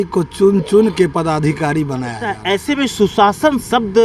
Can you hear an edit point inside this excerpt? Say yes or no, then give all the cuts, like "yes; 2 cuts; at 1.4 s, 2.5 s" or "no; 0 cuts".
yes; 1 cut; at 2.3 s